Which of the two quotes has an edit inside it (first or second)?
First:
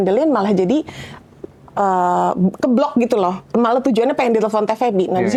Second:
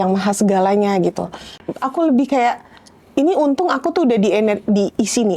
second